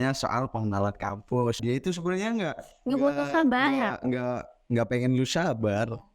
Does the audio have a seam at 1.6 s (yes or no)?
yes